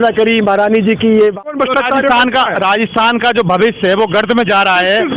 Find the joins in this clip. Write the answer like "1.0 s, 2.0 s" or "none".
1.5 s